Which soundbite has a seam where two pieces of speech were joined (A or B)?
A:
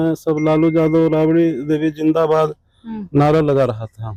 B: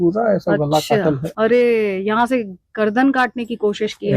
B